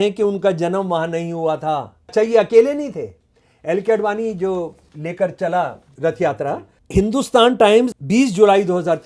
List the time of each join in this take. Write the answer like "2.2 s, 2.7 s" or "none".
2.1 s, 4.9 s, 5.8 s, 6.7 s, 8.0 s